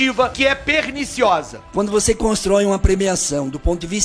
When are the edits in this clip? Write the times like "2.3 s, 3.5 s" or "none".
1.6 s